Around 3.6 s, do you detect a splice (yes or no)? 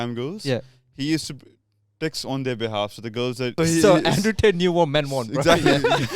yes